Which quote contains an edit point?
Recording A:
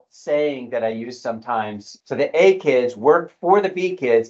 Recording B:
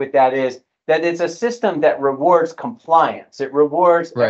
A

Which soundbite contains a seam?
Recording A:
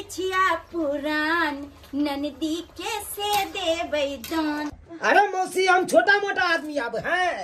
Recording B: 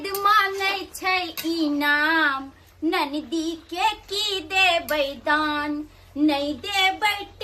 A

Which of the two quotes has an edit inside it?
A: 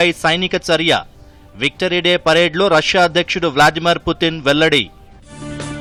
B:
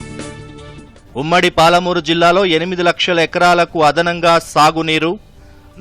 B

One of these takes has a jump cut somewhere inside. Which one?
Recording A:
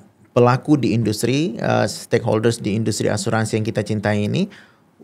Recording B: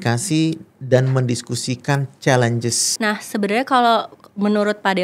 B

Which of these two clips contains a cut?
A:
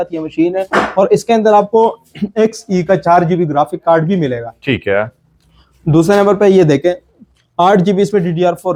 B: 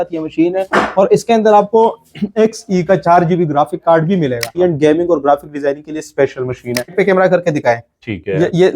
B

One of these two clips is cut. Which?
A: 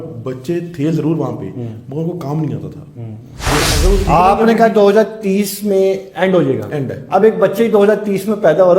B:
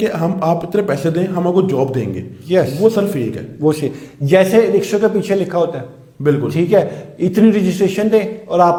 A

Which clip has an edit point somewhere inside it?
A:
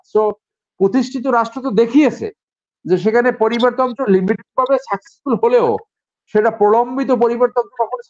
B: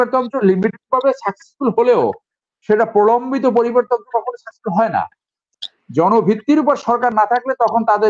B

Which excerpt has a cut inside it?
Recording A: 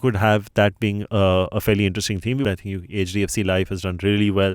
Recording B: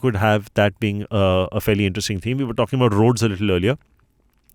A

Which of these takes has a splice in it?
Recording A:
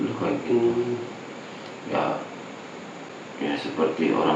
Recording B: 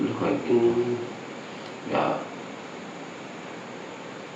A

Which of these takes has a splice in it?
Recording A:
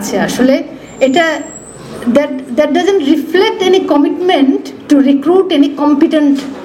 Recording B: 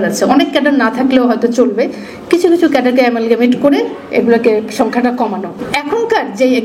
B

